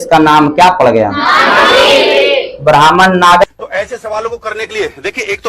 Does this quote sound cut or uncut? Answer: cut